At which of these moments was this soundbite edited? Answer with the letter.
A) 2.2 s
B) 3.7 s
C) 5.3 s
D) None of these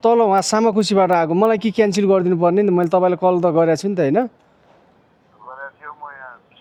D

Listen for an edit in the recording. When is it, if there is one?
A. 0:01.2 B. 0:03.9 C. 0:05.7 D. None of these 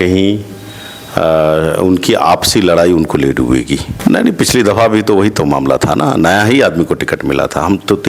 B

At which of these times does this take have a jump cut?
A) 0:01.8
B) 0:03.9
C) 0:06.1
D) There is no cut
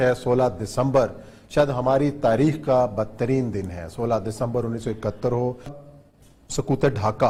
D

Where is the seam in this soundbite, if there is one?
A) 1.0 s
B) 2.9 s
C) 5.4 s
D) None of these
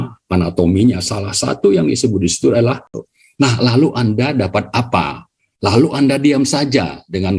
B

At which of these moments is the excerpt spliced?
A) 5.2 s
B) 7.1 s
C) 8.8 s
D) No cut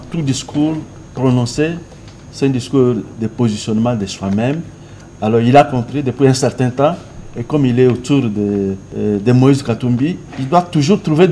C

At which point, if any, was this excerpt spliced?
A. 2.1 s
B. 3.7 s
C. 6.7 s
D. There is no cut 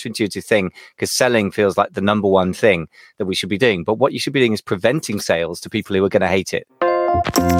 C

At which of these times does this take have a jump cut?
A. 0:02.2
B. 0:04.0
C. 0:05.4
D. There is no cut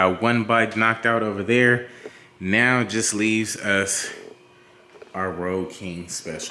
D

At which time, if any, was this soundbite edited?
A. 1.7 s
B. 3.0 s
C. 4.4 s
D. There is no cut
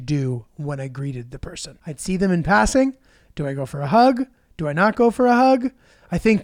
A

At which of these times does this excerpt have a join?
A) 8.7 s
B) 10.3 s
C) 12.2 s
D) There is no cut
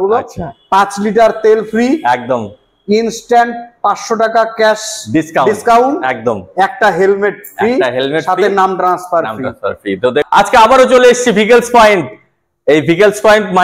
B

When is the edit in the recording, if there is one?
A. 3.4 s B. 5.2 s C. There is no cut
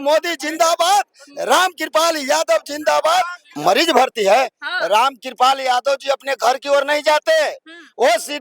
A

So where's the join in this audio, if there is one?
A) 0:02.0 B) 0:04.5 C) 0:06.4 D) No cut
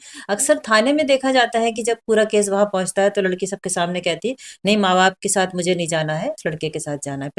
C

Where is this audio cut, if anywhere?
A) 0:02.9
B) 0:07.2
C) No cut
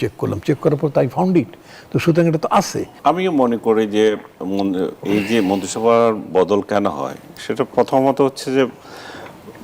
A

